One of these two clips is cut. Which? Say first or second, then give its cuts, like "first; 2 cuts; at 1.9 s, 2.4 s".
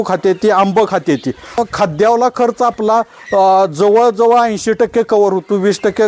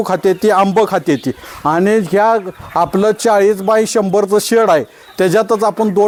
first; 1 cut; at 1.6 s